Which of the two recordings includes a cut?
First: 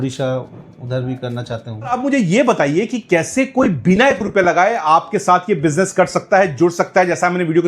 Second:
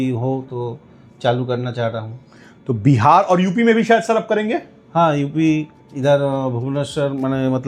first; 1 cut; at 1.9 s

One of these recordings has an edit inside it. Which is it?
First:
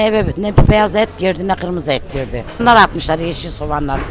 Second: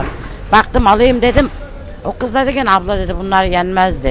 first; 1 cut; at 2.6 s

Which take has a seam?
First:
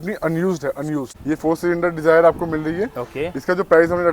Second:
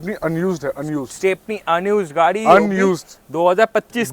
first; 1 cut; at 1.1 s

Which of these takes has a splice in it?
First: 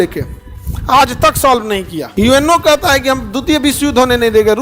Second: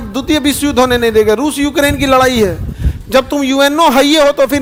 first; 1 cut; at 2.0 s

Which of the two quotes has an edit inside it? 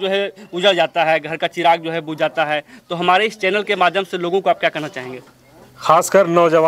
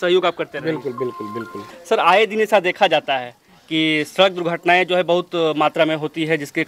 second; 1 cut; at 1.7 s

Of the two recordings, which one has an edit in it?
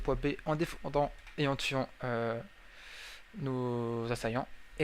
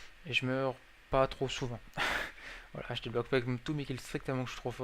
second; 1 cut; at 1.3 s

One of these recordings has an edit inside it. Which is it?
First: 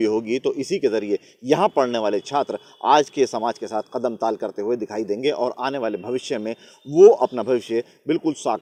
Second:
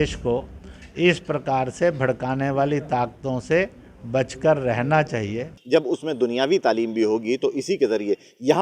second; 1 cut; at 5.5 s

